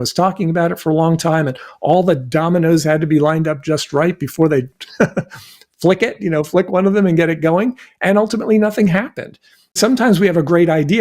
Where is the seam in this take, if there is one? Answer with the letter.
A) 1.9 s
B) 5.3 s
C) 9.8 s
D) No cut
C